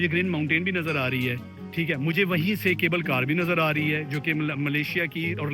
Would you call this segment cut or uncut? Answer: uncut